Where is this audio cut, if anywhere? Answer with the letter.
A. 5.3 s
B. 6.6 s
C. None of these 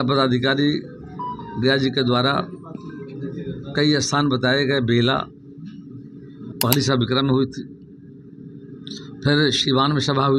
B